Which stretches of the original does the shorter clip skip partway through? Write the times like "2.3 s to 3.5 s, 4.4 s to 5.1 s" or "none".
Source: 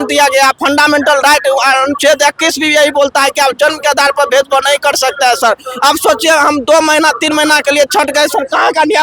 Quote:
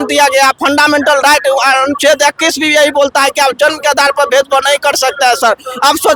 none